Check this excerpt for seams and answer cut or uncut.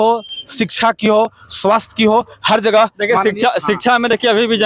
uncut